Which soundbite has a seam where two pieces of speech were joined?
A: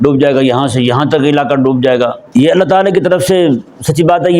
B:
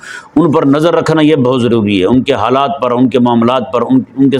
A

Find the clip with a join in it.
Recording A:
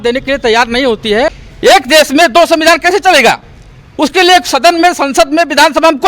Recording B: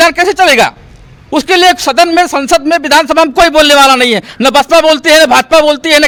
A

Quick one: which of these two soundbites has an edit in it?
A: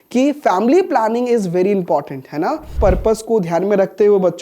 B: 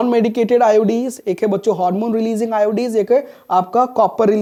A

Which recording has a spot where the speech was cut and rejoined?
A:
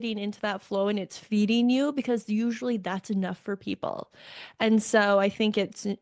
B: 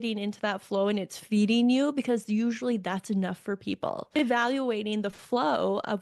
B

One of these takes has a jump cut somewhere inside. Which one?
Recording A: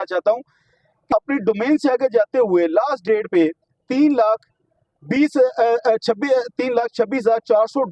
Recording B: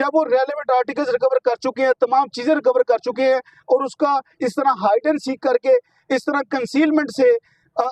A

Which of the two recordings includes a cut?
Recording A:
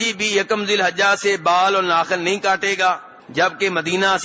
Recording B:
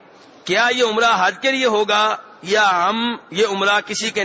A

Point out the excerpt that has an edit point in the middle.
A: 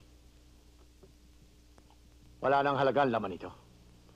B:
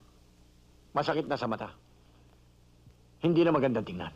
A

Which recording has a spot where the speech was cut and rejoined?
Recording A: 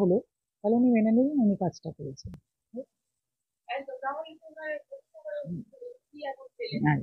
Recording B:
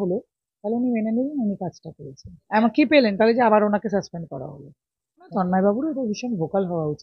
B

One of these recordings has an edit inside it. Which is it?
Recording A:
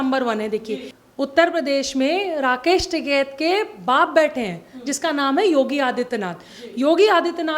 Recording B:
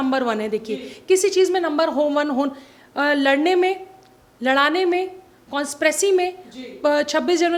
A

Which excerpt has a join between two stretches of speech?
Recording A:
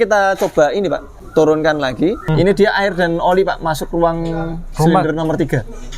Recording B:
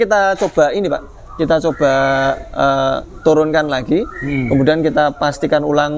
A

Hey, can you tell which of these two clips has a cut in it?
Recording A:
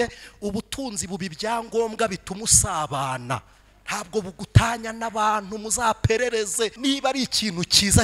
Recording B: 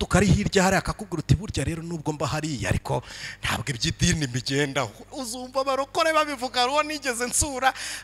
A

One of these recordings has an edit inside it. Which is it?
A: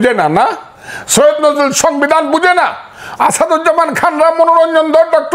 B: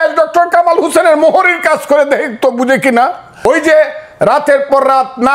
B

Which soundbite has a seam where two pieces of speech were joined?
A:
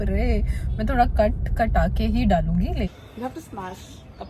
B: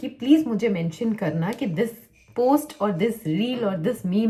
A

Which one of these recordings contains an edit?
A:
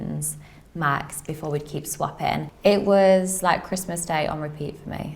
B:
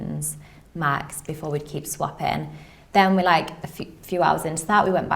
A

